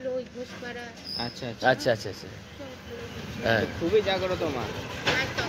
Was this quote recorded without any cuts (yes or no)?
yes